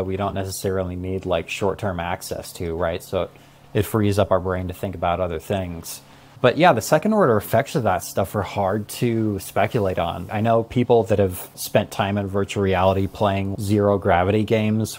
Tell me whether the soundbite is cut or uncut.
cut